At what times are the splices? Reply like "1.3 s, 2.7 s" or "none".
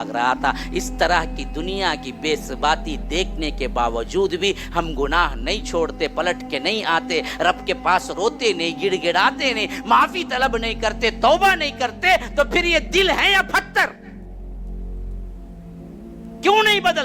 14.2 s, 15.8 s